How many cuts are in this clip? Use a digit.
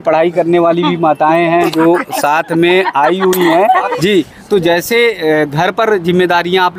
1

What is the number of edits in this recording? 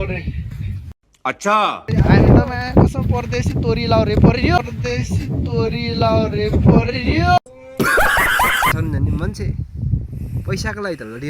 2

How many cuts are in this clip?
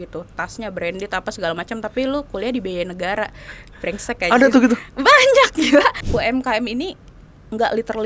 1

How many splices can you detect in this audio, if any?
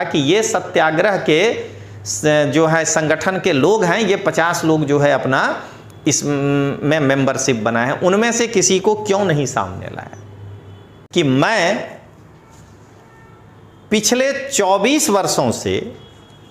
1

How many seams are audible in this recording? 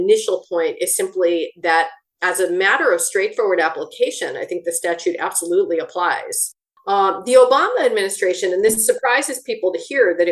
1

